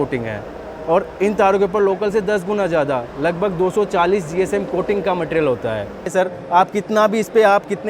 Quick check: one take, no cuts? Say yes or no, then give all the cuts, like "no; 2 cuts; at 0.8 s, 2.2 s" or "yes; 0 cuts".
no; 1 cut; at 6.1 s